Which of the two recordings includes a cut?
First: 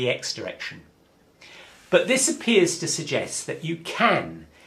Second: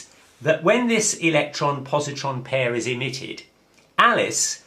second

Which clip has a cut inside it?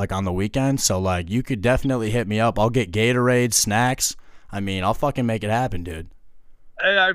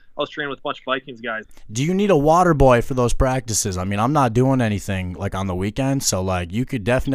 second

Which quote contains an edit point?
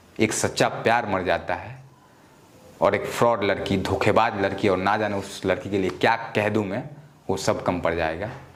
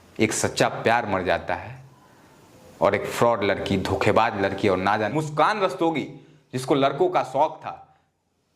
second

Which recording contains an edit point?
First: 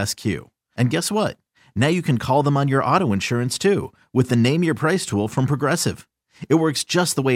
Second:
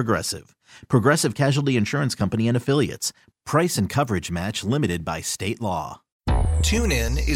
second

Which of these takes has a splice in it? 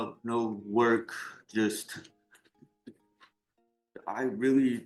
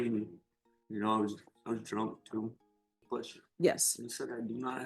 second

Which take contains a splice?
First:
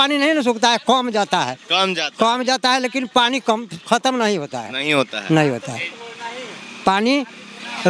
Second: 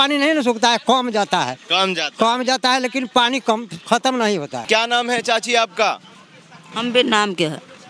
second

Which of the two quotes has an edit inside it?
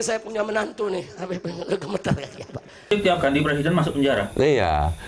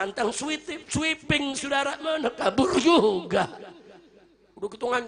first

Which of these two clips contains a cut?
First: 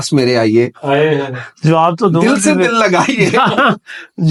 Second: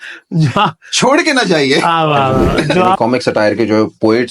second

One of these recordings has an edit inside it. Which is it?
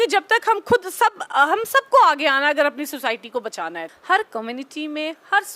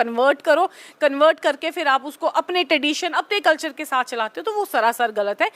first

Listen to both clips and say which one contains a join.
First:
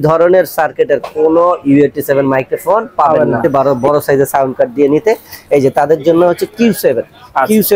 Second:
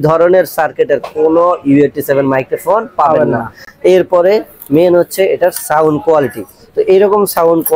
first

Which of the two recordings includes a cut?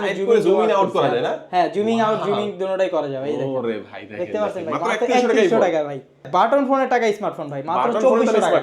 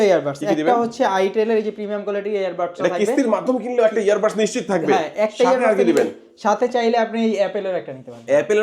first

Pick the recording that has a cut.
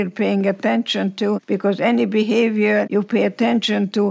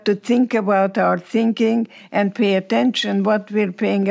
first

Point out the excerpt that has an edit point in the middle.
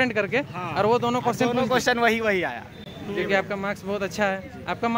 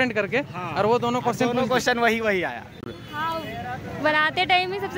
second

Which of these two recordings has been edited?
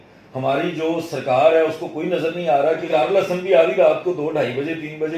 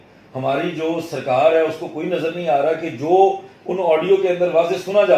first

